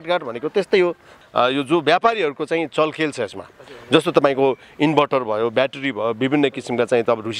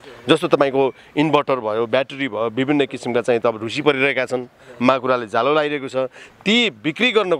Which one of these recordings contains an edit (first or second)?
first